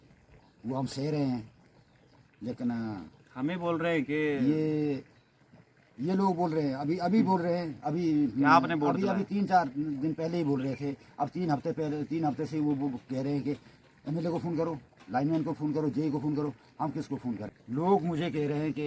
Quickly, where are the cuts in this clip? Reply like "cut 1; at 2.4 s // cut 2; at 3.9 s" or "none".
cut 1; at 17.5 s